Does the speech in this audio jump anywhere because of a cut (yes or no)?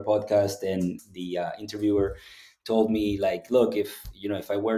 yes